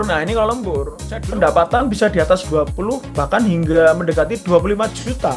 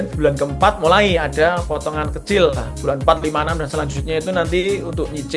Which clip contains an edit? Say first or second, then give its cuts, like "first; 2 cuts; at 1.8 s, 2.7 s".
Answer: first; 1 cut; at 1.1 s